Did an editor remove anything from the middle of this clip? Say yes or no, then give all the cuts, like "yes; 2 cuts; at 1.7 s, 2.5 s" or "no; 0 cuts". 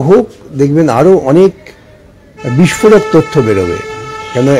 no; 0 cuts